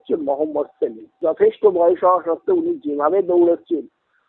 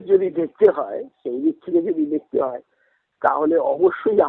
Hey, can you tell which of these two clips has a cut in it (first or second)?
first